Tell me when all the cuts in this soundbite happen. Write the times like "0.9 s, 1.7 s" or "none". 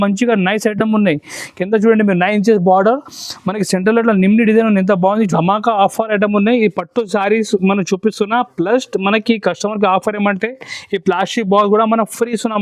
5.3 s